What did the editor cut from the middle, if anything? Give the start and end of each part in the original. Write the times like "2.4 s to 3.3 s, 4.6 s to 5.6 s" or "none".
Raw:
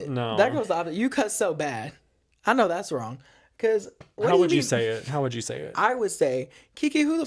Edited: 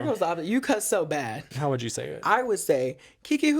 2.0 s to 5.0 s